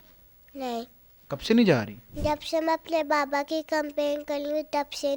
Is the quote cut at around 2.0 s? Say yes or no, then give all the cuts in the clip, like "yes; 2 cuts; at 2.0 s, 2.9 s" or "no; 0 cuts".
yes; 1 cut; at 2.0 s